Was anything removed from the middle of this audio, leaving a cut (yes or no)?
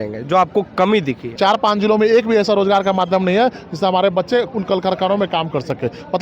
yes